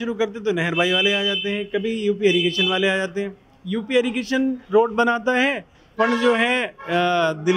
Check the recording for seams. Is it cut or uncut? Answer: uncut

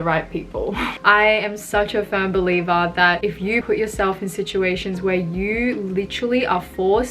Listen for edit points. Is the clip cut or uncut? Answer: cut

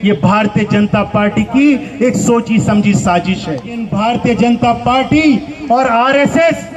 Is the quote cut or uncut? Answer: cut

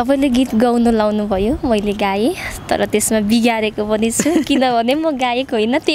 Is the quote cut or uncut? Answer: uncut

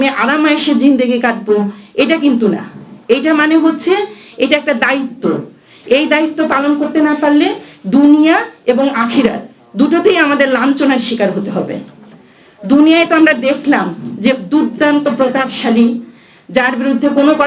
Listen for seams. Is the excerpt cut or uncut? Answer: uncut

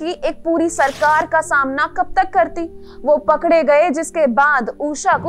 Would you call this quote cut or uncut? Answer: uncut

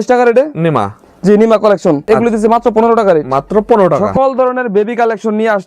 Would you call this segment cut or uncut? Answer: cut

